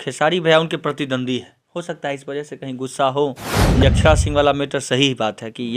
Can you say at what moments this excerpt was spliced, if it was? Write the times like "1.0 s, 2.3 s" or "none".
3.8 s